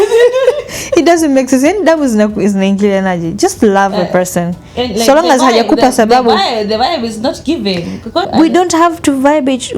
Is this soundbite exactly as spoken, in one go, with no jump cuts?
no; 1 cut; at 8.3 s

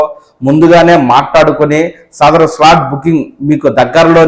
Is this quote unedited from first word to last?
yes; 0 cuts

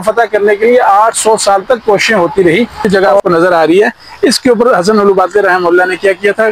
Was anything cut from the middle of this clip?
yes; 1 cut; at 2.8 s

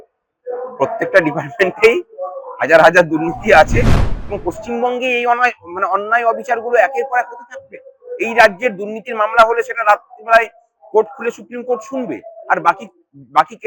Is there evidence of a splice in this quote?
yes; 1 cut; at 4.0 s

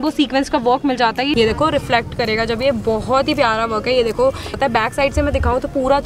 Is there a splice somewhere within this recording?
yes; 2 cuts; at 1.3 s, 4.5 s

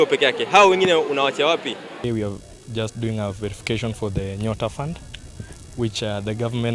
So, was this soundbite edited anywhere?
yes; 1 cut; at 2.0 s

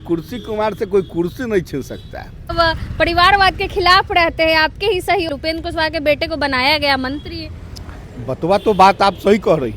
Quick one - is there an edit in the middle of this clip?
yes; 2 cuts; at 2.5 s, 5.3 s

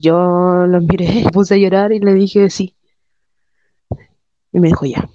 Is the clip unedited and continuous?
no; 1 cut; at 1.3 s

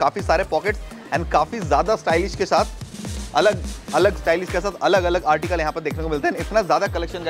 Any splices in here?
no; 0 cuts

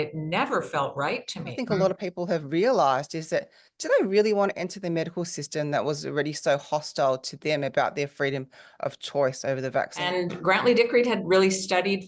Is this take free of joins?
no; 2 cuts; at 1.6 s, 10.0 s

